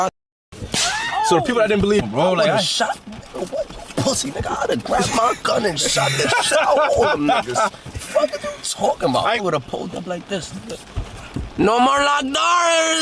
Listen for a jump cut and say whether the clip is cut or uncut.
cut